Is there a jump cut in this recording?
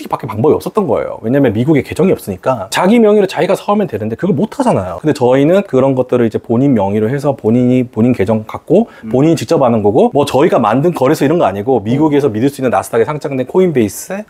yes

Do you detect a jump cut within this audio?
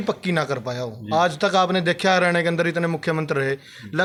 no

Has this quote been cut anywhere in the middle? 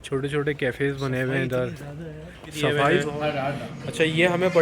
yes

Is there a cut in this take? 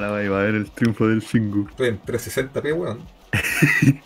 yes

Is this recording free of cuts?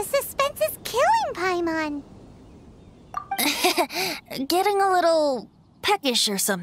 no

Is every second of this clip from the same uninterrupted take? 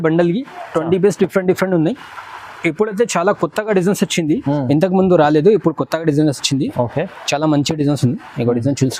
yes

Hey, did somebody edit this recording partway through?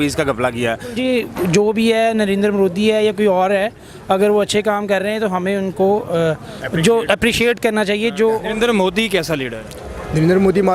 yes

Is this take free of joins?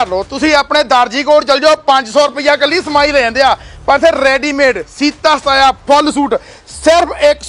yes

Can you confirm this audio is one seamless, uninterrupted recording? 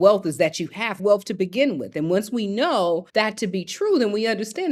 no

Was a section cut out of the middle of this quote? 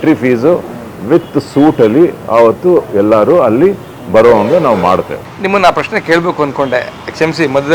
no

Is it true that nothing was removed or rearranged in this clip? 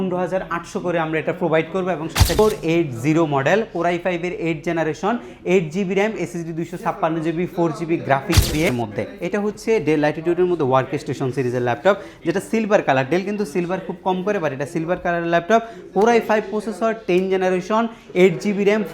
no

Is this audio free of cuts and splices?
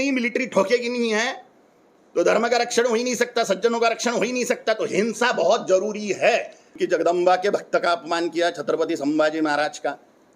no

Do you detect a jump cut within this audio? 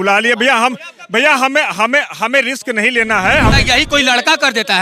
yes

